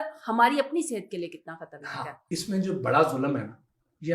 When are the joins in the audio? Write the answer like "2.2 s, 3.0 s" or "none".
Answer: 2.3 s